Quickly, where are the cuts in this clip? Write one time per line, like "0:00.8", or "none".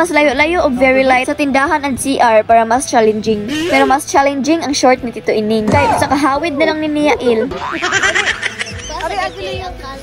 0:07.5